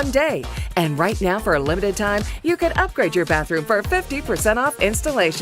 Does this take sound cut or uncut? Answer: uncut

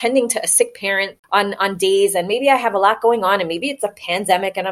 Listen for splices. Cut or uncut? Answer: cut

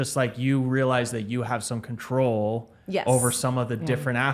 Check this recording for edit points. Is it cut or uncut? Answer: uncut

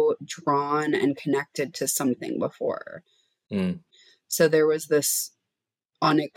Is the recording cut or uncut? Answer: cut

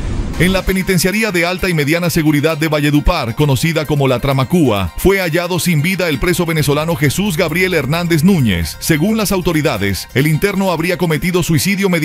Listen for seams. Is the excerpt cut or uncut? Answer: uncut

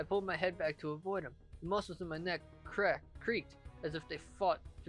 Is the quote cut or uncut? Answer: uncut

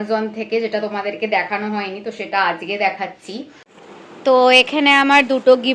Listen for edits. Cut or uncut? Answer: cut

